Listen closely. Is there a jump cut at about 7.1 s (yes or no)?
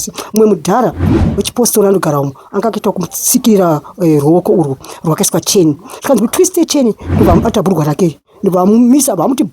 yes